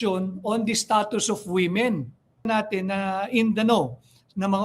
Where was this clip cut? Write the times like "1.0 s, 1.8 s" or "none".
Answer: 2.5 s